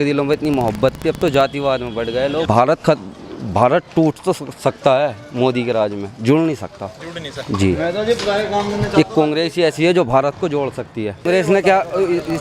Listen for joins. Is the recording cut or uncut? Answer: uncut